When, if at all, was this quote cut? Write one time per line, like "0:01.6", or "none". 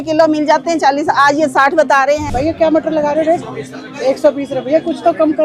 0:02.2